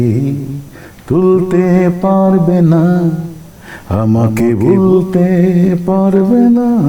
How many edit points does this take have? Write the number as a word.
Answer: zero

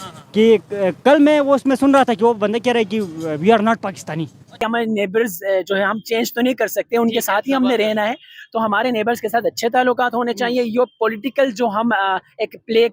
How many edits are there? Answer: one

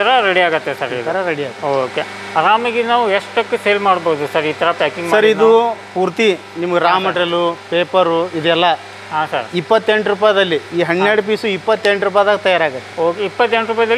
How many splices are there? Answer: zero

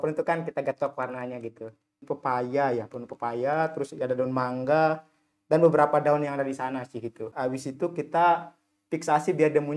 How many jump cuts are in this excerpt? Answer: two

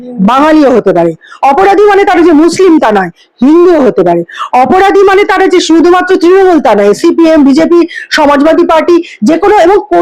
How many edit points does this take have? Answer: zero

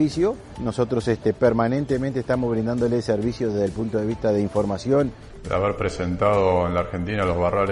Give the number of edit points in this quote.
one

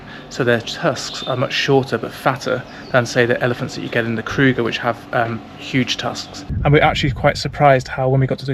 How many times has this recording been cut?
one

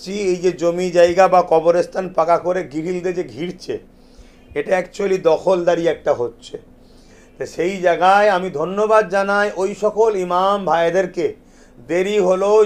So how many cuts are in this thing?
zero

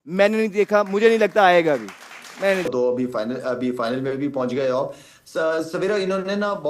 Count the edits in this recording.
one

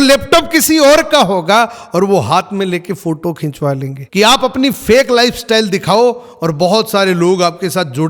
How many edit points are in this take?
one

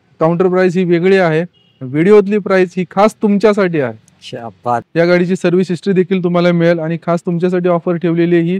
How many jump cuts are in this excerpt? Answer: one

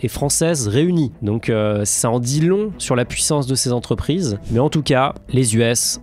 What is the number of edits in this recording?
one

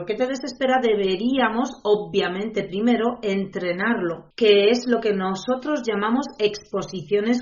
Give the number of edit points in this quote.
one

